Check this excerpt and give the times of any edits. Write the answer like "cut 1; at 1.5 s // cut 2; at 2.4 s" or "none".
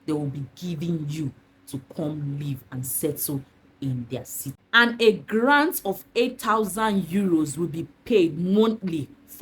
cut 1; at 4.6 s